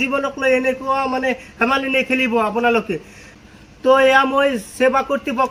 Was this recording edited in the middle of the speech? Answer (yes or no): no